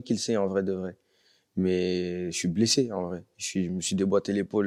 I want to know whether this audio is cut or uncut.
uncut